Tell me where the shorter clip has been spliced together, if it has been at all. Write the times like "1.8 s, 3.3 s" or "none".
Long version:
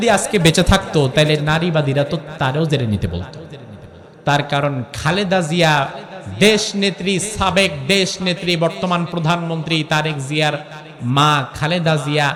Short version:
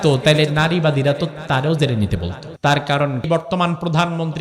2.4 s, 3.3 s